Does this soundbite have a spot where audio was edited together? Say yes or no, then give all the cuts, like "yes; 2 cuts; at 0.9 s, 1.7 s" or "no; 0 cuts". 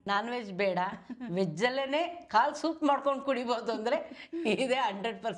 no; 0 cuts